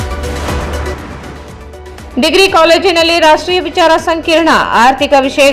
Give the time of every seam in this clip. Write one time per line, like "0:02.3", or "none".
0:01.4